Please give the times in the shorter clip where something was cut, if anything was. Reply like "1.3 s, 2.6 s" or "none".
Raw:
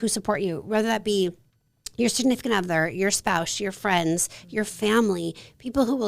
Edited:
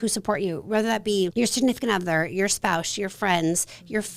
1.3 s